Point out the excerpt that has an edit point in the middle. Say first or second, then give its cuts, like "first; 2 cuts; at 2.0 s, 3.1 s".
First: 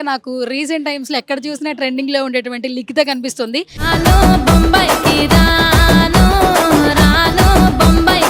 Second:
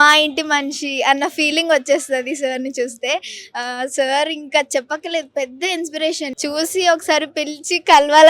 second; 1 cut; at 6.3 s